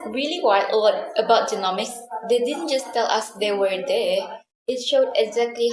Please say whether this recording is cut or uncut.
uncut